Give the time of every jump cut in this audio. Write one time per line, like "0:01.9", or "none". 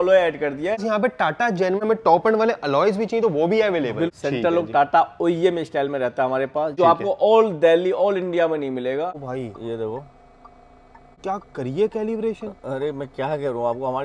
0:00.8
0:01.8
0:04.1
0:06.7
0:09.2
0:11.2